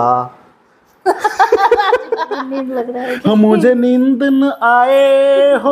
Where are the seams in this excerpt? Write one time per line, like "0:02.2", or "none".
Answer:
0:02.6